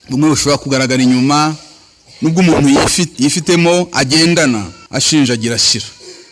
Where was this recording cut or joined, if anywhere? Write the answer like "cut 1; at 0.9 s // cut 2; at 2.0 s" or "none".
cut 1; at 3.1 s